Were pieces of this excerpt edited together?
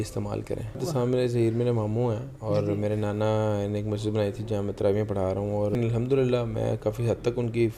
yes; 2 cuts; at 0.8 s, 5.8 s

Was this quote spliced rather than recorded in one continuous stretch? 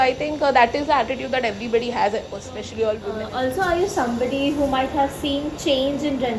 yes; 1 cut; at 3.1 s

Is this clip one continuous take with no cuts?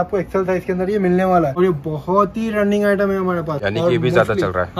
no; 2 cuts; at 1.5 s, 3.6 s

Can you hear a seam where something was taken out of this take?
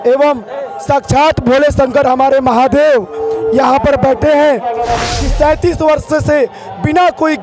yes; 1 cut; at 5.1 s

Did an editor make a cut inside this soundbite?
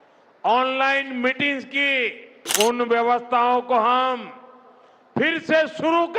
yes; 1 cut; at 2.5 s

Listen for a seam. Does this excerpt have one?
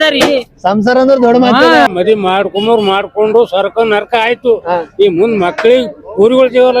yes; 1 cut; at 1.9 s

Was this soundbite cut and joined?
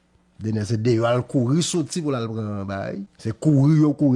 yes; 1 cut; at 3.1 s

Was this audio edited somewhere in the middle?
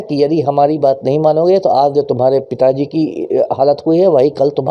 no; 0 cuts

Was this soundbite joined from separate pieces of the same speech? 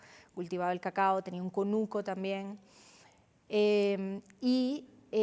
no; 0 cuts

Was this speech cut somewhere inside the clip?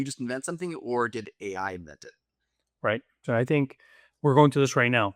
yes; 1 cut; at 3.2 s

